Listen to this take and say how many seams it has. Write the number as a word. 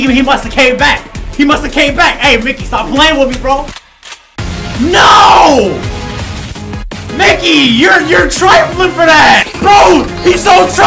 two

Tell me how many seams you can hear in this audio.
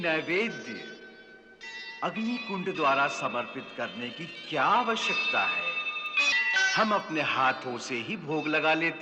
one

